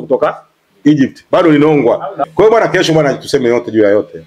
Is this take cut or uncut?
cut